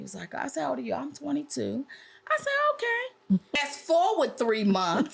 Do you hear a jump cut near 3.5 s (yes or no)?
yes